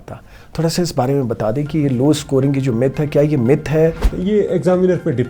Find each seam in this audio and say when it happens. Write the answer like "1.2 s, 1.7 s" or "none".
4.1 s